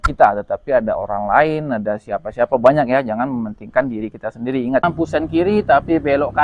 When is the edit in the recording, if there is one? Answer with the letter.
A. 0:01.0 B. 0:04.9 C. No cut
B